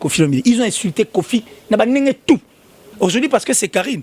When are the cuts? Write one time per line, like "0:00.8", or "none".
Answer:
0:02.8